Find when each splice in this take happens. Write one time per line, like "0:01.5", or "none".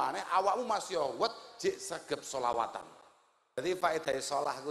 0:03.6